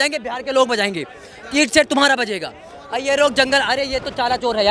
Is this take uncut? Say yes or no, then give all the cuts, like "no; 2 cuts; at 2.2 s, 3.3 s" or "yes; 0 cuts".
yes; 0 cuts